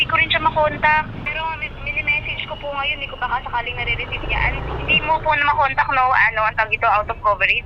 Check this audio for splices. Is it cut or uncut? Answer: cut